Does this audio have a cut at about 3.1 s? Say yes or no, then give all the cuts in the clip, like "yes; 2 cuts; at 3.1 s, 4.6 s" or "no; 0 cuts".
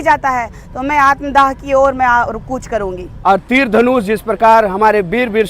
yes; 1 cut; at 3.1 s